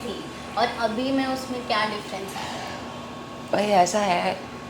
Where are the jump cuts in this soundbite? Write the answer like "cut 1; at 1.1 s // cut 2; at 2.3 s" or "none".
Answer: none